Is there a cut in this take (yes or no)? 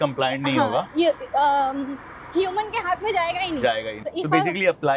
yes